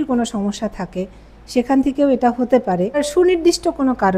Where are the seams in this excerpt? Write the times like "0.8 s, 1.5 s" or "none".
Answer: 3.1 s